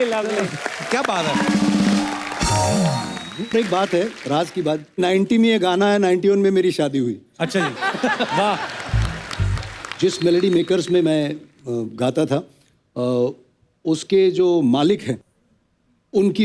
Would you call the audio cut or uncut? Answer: cut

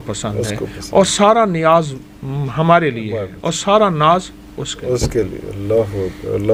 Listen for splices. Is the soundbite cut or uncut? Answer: uncut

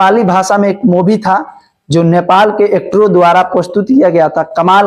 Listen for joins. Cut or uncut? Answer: uncut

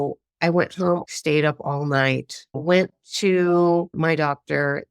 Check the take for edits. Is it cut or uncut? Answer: cut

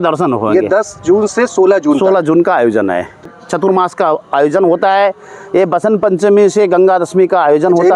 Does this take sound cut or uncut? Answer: cut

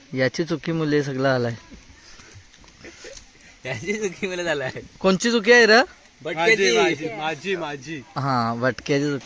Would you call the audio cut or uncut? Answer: uncut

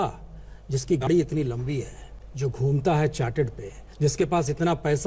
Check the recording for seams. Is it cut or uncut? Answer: cut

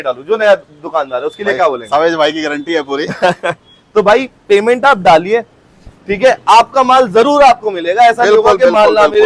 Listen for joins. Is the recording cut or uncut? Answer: uncut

